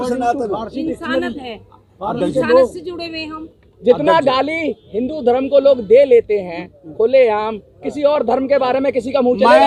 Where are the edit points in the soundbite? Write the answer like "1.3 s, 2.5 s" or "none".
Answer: none